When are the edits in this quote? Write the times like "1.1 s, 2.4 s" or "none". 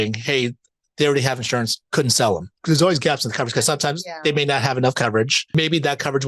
1.8 s, 2.5 s, 5.5 s